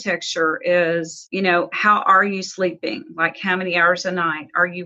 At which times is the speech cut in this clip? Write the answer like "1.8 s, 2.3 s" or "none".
1.2 s